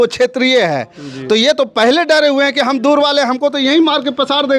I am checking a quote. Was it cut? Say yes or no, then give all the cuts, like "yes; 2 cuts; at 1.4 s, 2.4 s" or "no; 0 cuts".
no; 0 cuts